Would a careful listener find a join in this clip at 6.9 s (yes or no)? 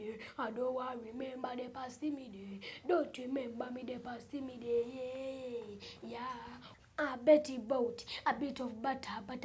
yes